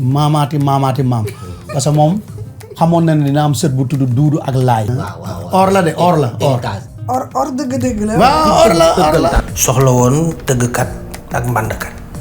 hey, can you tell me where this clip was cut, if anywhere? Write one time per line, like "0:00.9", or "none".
0:04.9
0:06.9
0:09.4